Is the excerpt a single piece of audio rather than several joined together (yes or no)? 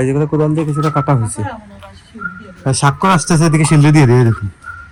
yes